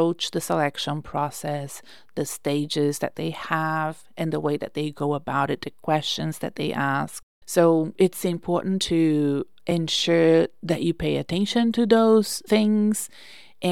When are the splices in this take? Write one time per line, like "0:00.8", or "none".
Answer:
0:12.4